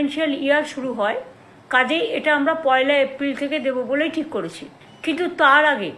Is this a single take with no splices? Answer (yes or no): yes